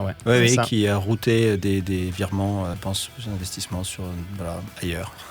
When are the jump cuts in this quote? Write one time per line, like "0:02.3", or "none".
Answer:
0:02.7